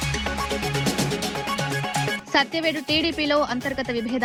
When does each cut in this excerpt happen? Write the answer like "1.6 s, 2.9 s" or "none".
none